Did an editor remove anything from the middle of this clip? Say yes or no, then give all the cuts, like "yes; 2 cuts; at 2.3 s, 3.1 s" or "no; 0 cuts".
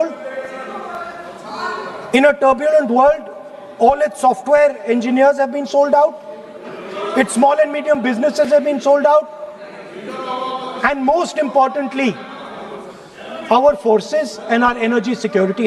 no; 0 cuts